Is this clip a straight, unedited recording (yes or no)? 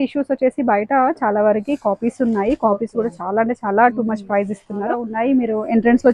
no